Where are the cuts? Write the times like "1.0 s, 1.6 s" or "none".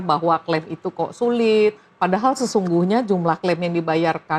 none